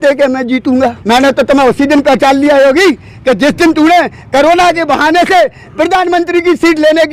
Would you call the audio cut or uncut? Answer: cut